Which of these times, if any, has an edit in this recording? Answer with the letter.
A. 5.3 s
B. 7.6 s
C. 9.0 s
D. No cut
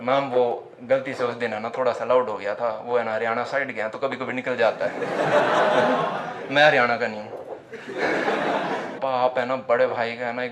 C